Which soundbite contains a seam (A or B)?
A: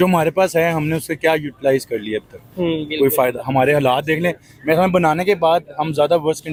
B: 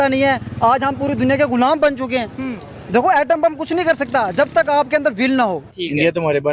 B